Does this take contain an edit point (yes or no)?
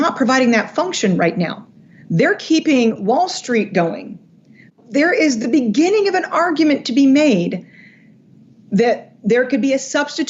yes